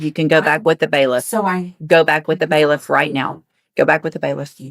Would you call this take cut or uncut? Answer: uncut